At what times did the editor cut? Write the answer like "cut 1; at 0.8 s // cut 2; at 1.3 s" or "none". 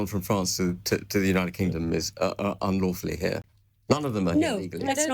none